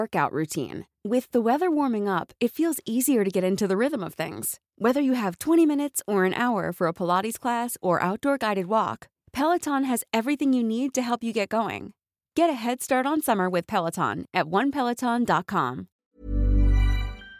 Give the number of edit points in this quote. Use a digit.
1